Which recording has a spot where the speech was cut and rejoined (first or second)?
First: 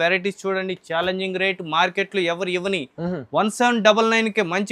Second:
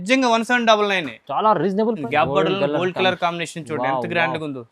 second